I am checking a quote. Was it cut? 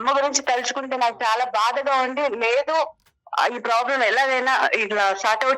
no; 0 cuts

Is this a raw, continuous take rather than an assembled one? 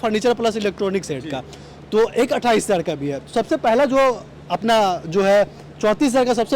yes; 0 cuts

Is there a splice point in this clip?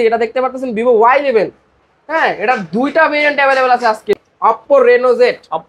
yes; 1 cut; at 4.2 s

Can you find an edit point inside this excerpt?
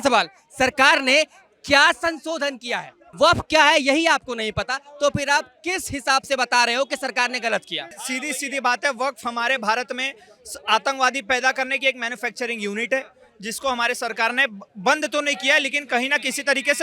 yes; 2 cuts; at 3.0 s, 8.0 s

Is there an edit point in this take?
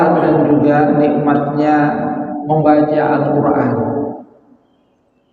no; 0 cuts

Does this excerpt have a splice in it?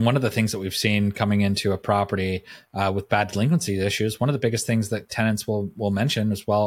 no; 0 cuts

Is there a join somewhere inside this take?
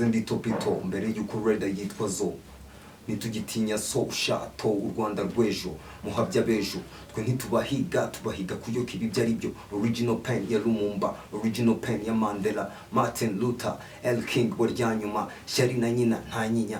no; 0 cuts

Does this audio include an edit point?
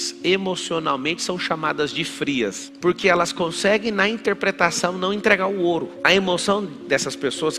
yes; 1 cut; at 2.7 s

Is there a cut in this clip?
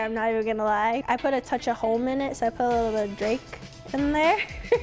yes; 1 cut; at 1.0 s

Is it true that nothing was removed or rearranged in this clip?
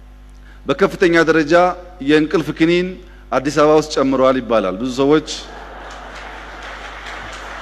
yes; 0 cuts

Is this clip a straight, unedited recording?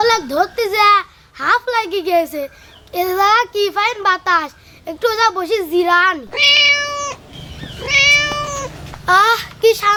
yes; 0 cuts

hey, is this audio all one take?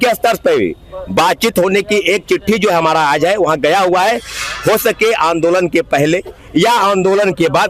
yes; 0 cuts

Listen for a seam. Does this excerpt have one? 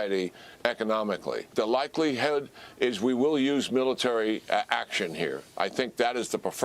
yes; 1 cut; at 1.5 s

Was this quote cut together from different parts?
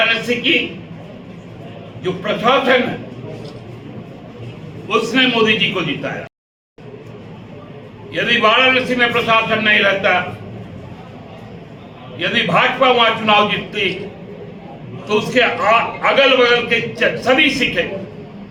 no; 0 cuts

